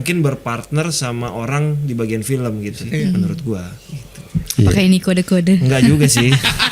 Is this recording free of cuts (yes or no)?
no